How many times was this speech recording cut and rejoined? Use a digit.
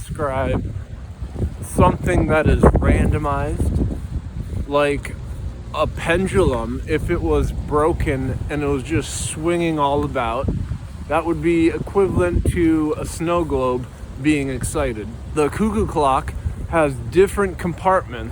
1